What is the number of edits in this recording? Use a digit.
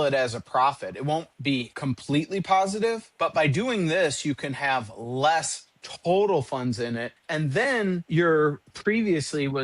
5